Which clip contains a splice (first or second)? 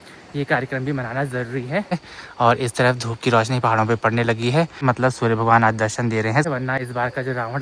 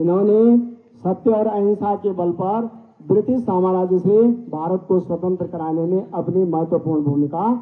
first